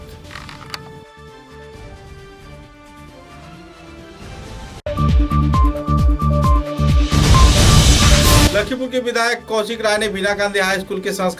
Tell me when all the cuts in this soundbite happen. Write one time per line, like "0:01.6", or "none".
none